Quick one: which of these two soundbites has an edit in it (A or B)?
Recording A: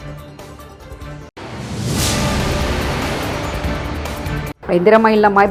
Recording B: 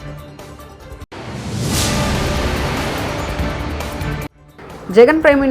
B